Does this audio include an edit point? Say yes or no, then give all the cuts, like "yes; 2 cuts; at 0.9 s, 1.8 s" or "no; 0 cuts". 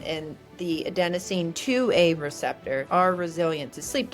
yes; 1 cut; at 2.8 s